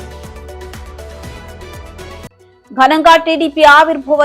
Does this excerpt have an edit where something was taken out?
yes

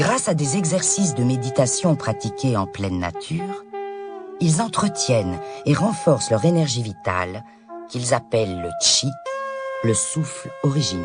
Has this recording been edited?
yes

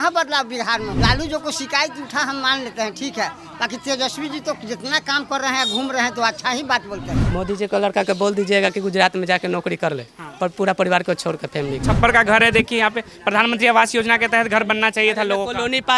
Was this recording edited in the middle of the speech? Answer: yes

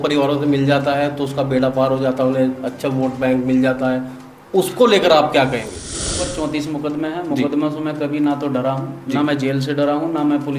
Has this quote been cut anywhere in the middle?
yes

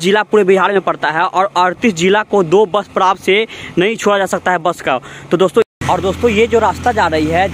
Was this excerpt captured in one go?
no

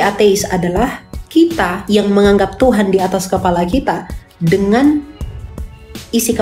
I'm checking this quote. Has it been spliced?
no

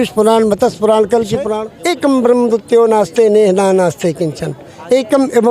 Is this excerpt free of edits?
no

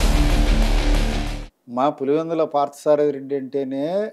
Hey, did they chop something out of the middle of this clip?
yes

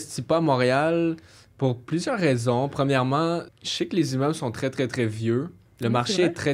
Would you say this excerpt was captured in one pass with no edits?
no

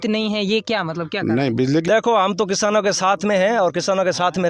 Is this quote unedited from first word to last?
no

